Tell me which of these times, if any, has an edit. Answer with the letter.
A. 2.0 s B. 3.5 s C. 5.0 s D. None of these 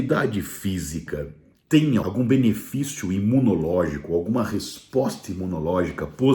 A